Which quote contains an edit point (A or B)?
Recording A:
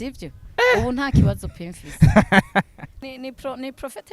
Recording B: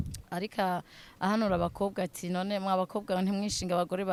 A